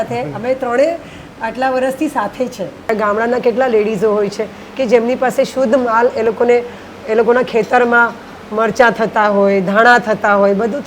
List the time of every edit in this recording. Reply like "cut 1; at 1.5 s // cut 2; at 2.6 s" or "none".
cut 1; at 2.9 s

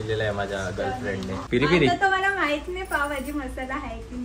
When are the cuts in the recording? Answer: cut 1; at 1.4 s

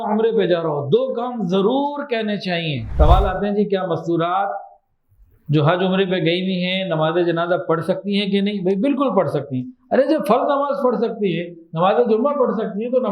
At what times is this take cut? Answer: cut 1; at 2.8 s

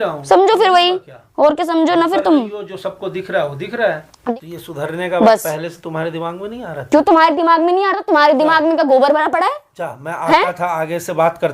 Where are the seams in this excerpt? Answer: cut 1; at 4.2 s

